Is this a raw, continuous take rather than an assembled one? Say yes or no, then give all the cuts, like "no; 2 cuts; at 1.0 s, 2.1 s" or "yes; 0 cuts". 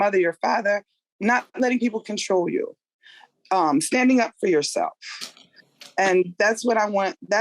yes; 0 cuts